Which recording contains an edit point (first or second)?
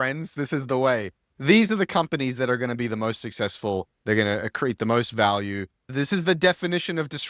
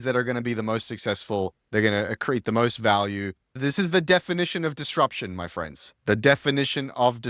first